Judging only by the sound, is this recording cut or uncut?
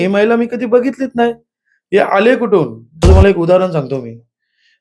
cut